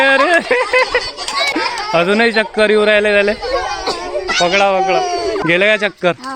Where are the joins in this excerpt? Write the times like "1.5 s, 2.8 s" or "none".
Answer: 1.5 s, 5.4 s